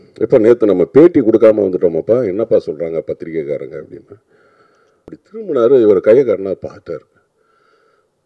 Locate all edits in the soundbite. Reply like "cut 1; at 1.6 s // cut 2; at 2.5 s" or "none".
cut 1; at 5.1 s